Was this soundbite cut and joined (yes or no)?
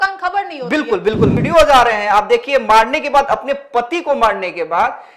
yes